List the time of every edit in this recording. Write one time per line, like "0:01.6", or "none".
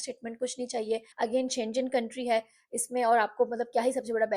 0:01.1